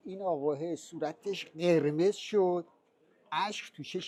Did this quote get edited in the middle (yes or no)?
no